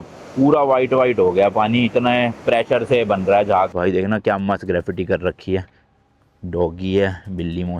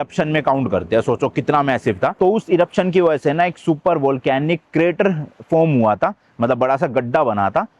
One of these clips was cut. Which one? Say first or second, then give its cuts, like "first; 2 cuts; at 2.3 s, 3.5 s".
first; 1 cut; at 3.7 s